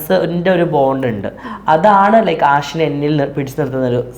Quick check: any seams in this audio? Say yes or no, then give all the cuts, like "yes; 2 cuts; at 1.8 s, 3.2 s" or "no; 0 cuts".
no; 0 cuts